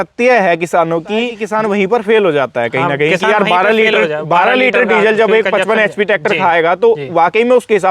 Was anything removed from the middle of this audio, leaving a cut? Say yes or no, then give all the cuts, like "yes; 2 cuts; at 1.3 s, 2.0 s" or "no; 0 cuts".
yes; 1 cut; at 1.4 s